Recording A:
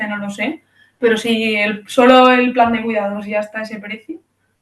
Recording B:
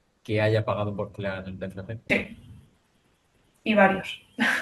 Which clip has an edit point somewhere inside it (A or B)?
B